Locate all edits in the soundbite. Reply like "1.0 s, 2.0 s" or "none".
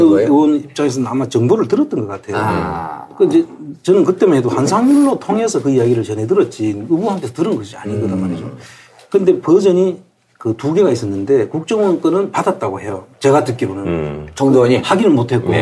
10.6 s

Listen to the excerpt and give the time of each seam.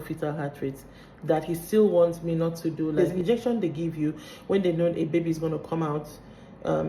2.9 s

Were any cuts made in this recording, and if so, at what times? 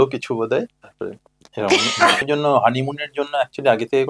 2.2 s

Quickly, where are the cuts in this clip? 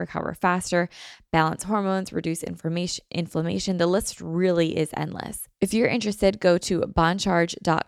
5.4 s

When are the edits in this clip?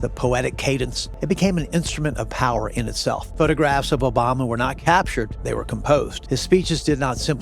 1.1 s, 3.3 s, 5.4 s, 6.2 s

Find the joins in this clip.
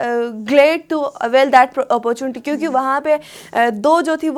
none

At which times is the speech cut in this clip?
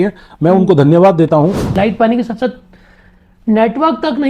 1.6 s

